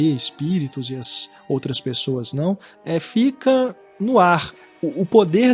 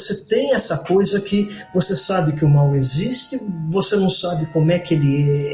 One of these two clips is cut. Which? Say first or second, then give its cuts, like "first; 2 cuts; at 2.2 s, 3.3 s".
first; 3 cuts; at 2.7 s, 3.9 s, 4.5 s